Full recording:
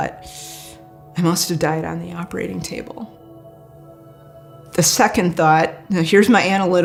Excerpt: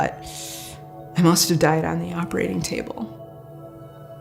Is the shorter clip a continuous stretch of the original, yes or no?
yes